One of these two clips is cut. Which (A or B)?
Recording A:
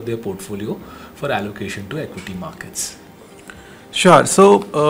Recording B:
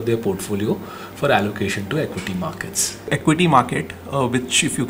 B